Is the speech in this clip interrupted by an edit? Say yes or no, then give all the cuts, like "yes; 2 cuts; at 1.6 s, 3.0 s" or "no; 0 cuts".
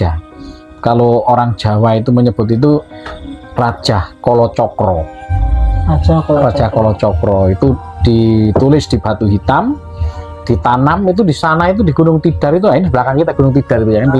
no; 0 cuts